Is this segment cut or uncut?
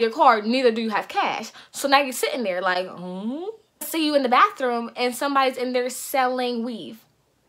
cut